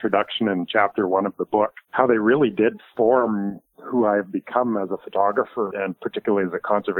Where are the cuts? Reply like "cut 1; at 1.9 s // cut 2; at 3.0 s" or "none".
cut 1; at 1.8 s // cut 2; at 5.7 s